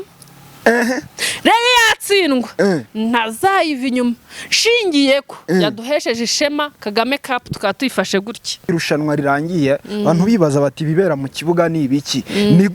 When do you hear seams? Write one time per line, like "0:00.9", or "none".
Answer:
0:08.6